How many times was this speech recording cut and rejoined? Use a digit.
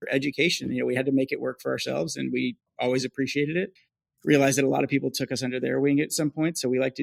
0